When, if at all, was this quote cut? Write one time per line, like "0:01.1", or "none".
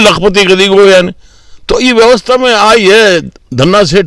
none